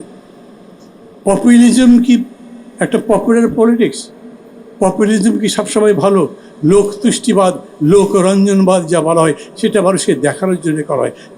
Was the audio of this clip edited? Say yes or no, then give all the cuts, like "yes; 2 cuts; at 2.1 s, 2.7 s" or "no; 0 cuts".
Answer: no; 0 cuts